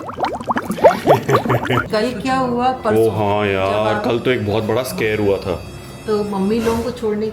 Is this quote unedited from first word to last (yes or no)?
no